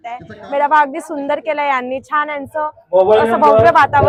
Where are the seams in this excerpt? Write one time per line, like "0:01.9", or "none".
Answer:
none